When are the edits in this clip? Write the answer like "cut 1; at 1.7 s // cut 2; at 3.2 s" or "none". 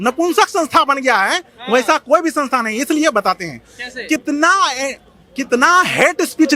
none